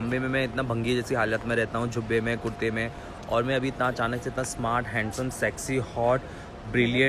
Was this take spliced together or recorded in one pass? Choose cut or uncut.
uncut